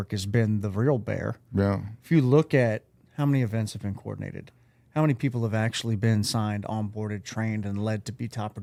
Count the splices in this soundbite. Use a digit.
0